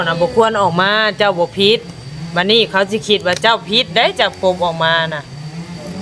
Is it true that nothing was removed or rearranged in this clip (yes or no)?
yes